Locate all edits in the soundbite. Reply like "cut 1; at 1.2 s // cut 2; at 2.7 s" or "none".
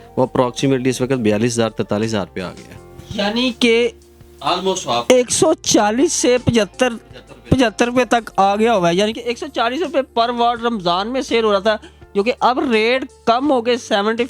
none